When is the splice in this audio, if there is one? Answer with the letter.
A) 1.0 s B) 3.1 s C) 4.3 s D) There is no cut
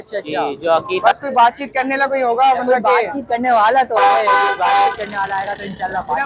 A